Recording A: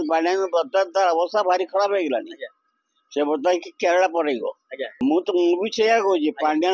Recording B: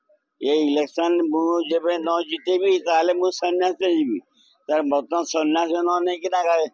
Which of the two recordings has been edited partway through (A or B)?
A